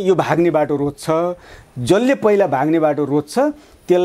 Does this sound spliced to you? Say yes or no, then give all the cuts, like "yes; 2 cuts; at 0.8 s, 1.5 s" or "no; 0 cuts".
no; 0 cuts